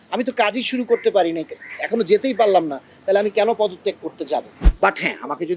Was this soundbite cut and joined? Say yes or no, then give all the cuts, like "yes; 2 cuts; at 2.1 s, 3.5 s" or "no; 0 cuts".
yes; 1 cut; at 4.6 s